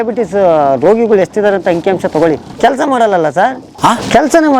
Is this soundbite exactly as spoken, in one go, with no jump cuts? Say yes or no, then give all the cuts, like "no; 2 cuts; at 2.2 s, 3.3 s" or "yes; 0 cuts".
no; 2 cuts; at 2.6 s, 3.7 s